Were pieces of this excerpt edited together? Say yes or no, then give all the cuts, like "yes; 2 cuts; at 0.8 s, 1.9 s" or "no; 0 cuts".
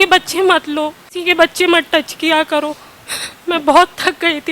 yes; 1 cut; at 1.2 s